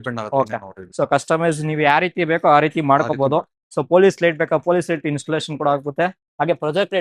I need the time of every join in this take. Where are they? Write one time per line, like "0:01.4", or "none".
none